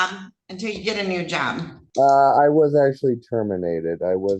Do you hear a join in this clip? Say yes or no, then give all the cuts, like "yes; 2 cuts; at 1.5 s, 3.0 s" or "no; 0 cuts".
yes; 1 cut; at 1.8 s